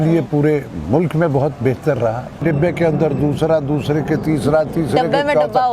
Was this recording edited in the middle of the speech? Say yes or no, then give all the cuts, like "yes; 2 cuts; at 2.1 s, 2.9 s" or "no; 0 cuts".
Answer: yes; 1 cut; at 2.4 s